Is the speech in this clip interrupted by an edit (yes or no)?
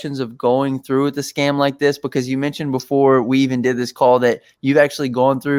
no